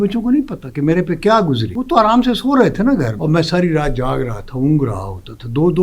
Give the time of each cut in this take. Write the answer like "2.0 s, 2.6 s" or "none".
1.7 s, 3.1 s